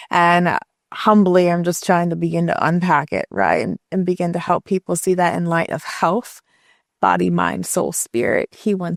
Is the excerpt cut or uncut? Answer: uncut